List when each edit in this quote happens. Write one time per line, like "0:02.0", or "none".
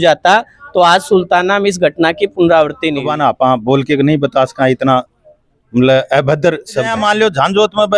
0:03.0
0:06.9